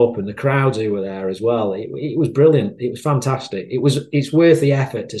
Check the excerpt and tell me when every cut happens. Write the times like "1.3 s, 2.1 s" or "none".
none